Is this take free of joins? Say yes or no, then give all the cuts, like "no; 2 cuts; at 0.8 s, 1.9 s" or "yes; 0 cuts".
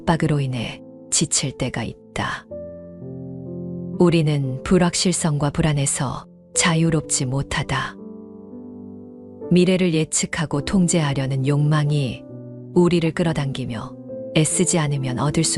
yes; 0 cuts